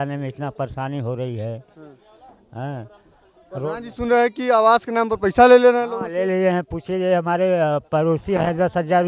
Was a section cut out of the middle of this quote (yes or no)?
no